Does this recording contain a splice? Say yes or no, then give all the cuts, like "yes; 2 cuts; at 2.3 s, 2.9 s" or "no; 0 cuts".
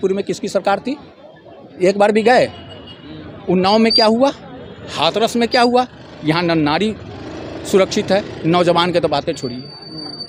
no; 0 cuts